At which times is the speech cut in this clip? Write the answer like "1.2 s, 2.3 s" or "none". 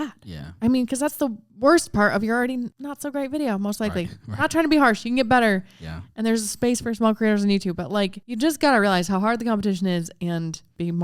2.8 s, 8.2 s